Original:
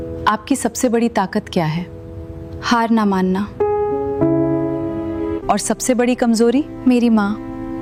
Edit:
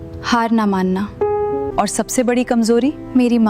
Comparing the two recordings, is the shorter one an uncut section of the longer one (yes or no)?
no